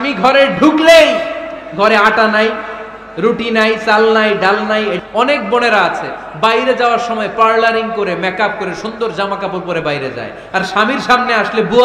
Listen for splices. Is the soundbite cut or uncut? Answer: cut